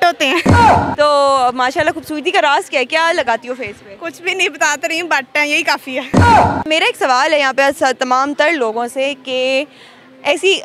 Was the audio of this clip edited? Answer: no; 0 cuts

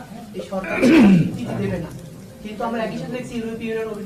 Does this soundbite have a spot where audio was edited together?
no; 0 cuts

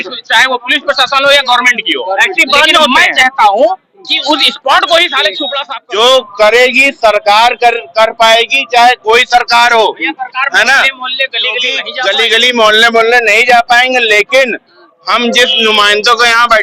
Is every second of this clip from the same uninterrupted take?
no; 2 cuts; at 5.5 s, 11.8 s

